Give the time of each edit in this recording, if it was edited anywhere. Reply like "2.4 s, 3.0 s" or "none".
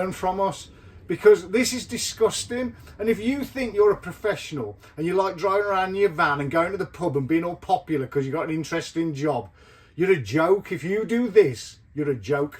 none